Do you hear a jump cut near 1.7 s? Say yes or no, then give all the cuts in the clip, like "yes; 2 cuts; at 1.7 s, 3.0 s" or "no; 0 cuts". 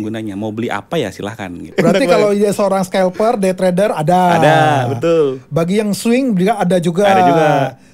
yes; 1 cut; at 1.7 s